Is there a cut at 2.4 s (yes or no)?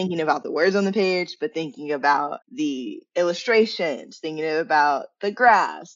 yes